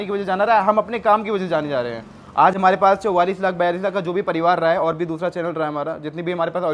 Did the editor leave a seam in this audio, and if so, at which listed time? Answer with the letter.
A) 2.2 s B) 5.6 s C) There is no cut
C